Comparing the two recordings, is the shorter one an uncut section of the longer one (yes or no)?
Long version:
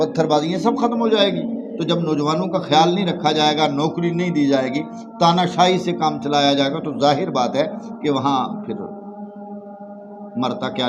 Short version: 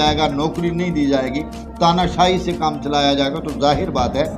yes